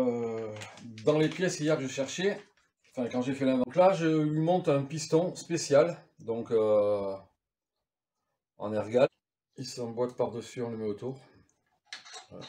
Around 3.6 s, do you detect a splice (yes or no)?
yes